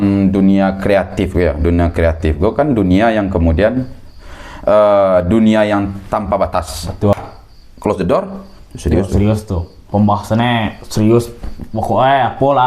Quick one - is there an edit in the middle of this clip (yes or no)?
yes